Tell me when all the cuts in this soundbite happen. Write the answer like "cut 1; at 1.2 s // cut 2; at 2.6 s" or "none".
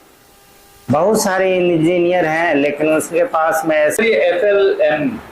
cut 1; at 4.0 s